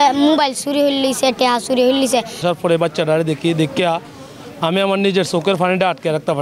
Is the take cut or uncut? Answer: cut